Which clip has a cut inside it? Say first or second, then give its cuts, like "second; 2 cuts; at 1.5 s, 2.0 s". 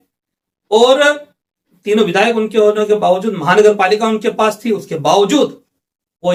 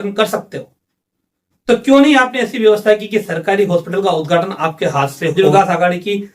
second; 1 cut; at 5.3 s